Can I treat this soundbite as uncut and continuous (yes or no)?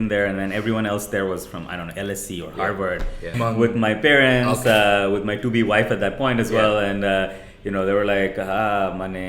no